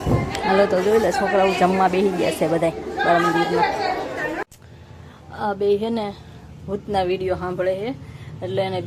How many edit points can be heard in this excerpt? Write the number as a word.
one